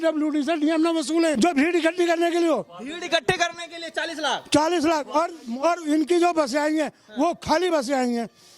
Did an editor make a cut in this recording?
yes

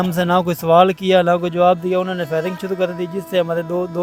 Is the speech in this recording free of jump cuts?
yes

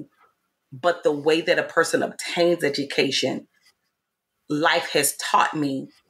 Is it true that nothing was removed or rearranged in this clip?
yes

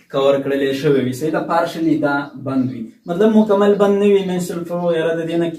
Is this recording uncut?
yes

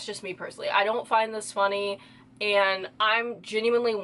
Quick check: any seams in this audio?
no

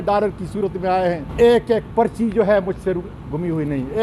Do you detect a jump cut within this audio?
yes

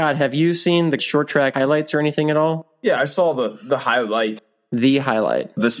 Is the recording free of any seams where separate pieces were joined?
no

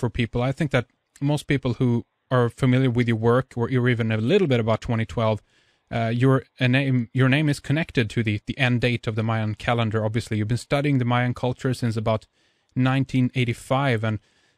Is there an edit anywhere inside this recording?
no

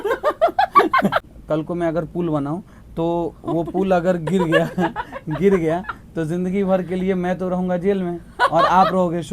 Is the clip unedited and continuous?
no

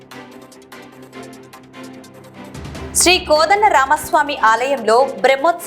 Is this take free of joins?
no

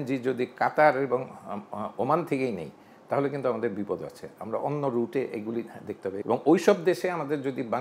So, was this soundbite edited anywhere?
yes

